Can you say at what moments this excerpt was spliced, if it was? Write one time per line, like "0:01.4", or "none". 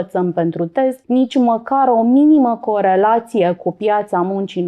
0:01.0